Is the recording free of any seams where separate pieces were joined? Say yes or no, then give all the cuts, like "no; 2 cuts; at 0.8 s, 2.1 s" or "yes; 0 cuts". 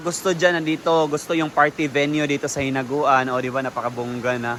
yes; 0 cuts